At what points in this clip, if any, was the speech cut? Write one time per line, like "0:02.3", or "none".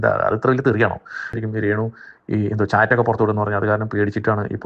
0:01.4